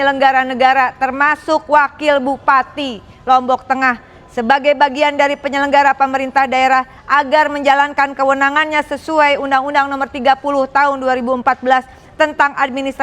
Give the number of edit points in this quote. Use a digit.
1